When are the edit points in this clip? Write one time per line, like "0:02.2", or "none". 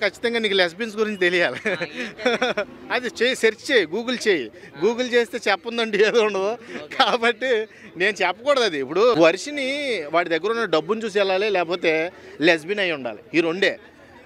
0:09.2